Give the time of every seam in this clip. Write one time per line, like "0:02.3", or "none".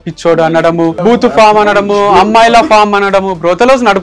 0:01.0